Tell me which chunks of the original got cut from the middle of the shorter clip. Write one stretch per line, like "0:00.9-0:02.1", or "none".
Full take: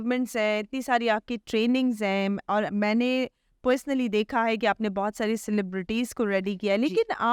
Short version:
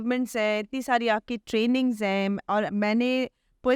none

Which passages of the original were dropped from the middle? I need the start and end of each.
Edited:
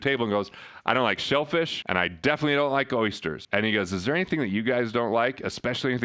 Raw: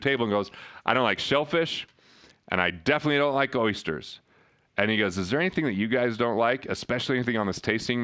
0:01.8-0:02.4
0:04.0-0:04.7

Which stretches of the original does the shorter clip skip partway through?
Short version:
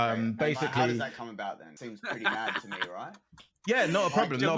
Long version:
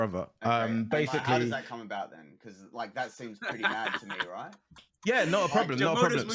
0:02.3-0:03.2

